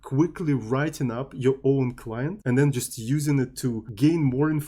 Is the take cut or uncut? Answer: cut